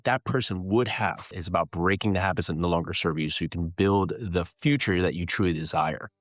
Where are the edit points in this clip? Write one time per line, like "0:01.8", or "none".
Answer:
0:01.2